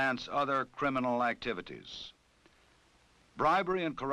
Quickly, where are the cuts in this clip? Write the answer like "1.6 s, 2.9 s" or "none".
2.6 s